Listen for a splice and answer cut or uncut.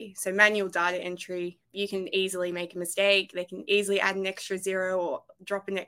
cut